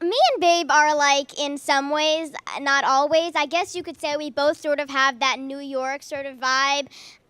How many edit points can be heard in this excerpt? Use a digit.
1